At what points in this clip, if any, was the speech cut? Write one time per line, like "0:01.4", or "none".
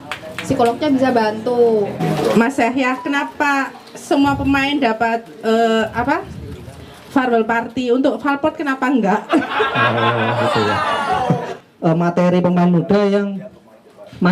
0:02.0
0:11.5